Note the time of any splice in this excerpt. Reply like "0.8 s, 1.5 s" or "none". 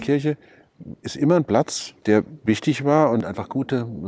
1.8 s, 3.2 s